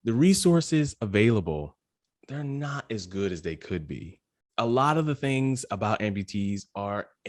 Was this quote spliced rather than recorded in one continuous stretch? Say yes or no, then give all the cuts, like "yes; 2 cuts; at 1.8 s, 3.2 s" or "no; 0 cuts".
no; 0 cuts